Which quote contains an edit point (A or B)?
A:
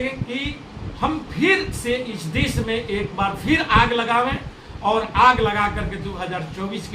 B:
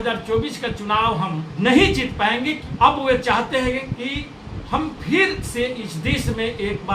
B